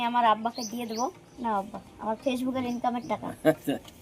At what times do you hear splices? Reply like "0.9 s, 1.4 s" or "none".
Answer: 1.3 s